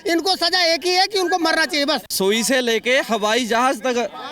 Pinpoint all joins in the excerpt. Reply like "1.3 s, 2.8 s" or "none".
2.1 s